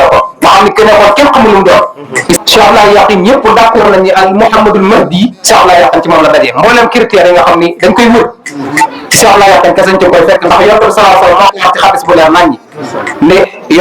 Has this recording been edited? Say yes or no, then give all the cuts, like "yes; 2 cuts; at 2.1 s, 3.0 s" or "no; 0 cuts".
yes; 1 cut; at 2.4 s